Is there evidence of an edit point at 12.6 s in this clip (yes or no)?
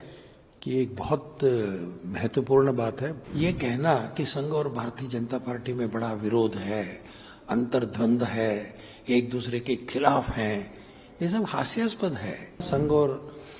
yes